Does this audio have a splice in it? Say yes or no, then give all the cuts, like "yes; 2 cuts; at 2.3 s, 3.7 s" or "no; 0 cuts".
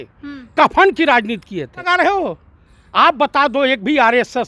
yes; 1 cut; at 1.8 s